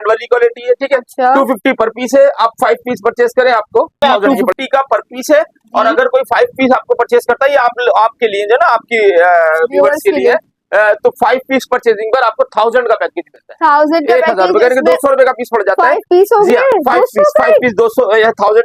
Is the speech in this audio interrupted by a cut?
yes; 1 cut; at 4.0 s

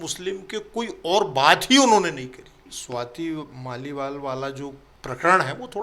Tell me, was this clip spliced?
yes; 2 cuts; at 2.8 s, 4.9 s

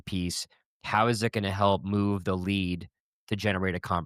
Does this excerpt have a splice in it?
no; 0 cuts

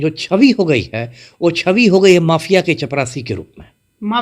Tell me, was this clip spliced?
no; 0 cuts

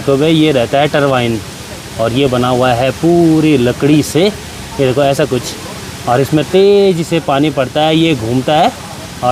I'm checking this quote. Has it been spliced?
no; 0 cuts

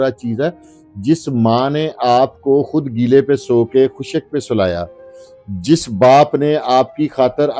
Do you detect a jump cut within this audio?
no; 0 cuts

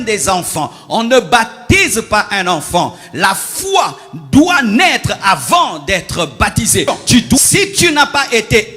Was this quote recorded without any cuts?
no; 1 cut; at 7.4 s

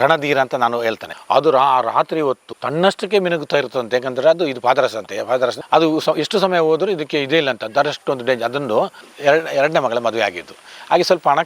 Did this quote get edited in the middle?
yes; 2 cuts; at 1.0 s, 9.1 s

